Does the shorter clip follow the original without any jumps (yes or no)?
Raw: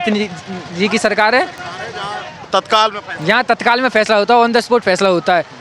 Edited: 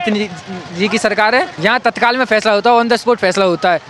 no